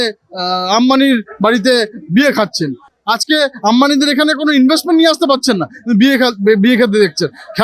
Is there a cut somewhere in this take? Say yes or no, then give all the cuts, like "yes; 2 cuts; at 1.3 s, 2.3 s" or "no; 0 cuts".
no; 0 cuts